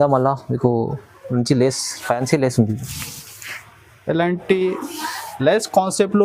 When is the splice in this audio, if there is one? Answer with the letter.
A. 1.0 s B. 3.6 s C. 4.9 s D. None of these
D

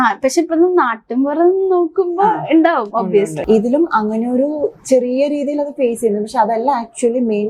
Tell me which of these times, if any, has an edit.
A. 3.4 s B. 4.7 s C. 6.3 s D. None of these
A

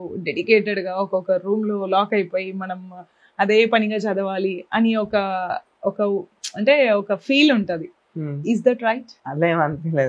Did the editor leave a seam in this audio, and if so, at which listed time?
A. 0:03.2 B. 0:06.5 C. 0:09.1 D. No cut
D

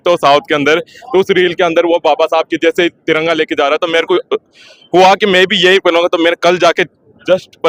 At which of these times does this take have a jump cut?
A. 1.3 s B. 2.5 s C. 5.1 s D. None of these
D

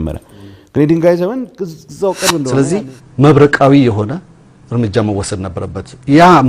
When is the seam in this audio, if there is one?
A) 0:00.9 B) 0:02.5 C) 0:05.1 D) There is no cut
B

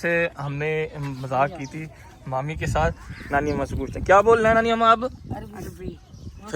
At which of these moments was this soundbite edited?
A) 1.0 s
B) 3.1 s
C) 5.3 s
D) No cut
B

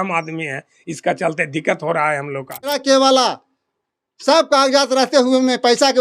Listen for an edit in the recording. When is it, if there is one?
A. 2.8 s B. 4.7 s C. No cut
A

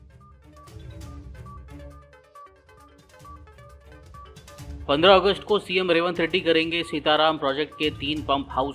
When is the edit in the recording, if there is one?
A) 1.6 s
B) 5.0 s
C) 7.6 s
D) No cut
A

